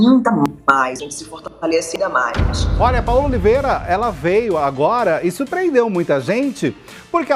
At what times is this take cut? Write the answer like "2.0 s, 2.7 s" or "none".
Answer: 2.6 s